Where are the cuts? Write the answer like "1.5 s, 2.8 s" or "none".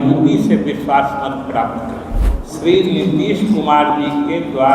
2.3 s